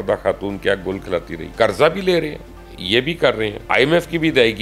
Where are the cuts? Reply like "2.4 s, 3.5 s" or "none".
1.4 s, 3.6 s

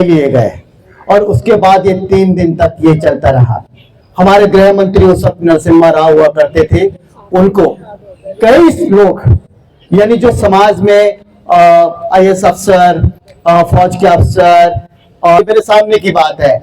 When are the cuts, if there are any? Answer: 15.4 s

